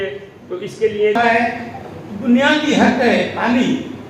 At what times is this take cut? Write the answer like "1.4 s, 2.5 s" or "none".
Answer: 1.2 s

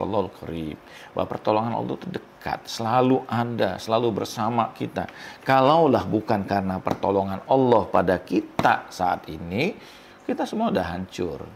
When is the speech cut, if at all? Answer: none

